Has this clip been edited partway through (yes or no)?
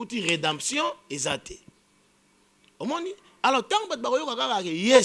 no